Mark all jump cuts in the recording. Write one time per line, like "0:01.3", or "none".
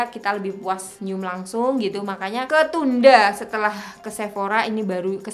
0:00.9
0:02.5